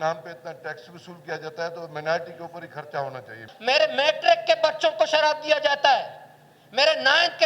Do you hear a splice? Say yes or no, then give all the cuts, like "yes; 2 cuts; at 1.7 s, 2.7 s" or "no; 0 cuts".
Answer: yes; 1 cut; at 3.4 s